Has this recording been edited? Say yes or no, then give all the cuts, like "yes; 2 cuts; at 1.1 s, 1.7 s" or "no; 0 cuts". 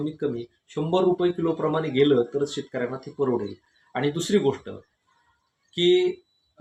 no; 0 cuts